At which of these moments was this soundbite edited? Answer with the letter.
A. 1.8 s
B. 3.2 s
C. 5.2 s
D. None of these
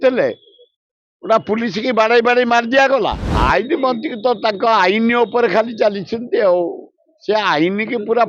B